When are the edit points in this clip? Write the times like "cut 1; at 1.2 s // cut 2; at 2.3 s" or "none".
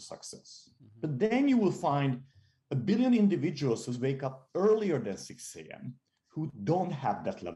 none

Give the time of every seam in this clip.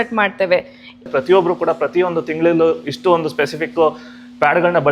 cut 1; at 1.0 s

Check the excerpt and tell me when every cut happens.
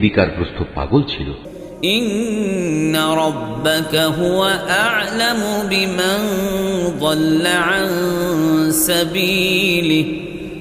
cut 1; at 1.4 s

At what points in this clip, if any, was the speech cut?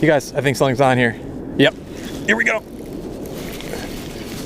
cut 1; at 1.3 s

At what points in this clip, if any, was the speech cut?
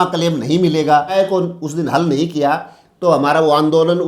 cut 1; at 1.2 s

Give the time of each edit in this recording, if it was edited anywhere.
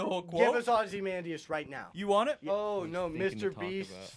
cut 1; at 2.5 s

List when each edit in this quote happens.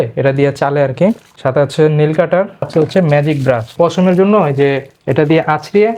cut 1; at 1.3 s // cut 2; at 2.7 s // cut 3; at 3.7 s

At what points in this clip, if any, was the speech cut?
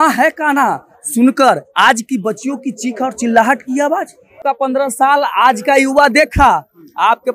cut 1; at 4.4 s

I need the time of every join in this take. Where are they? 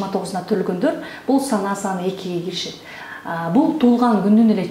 none

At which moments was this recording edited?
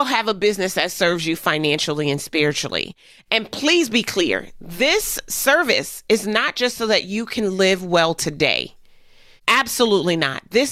none

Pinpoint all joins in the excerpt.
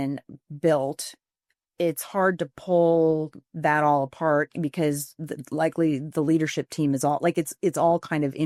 none

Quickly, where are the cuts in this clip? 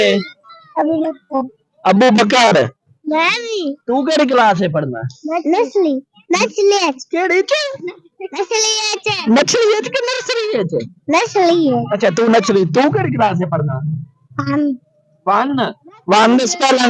cut 1; at 7.2 s

